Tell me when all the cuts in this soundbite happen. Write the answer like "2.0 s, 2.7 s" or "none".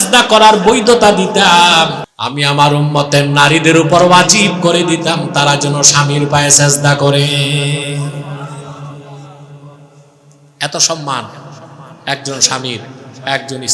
2.1 s